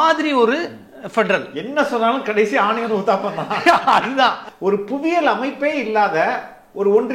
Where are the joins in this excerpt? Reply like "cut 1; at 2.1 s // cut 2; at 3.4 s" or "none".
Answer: cut 1; at 4.5 s